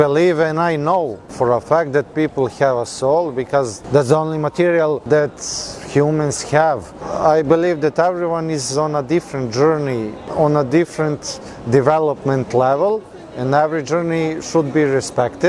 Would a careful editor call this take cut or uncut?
cut